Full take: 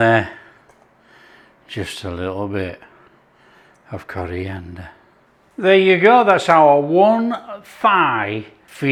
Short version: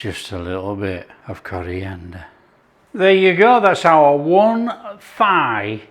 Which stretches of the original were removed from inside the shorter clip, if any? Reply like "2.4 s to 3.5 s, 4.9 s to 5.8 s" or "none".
2.9 s to 3.8 s